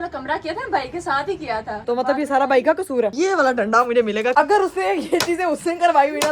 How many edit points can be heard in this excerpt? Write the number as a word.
three